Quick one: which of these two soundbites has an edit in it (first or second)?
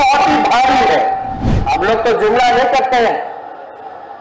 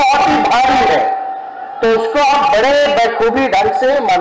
first